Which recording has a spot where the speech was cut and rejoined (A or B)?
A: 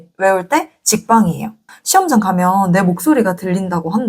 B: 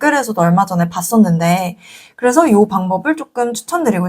A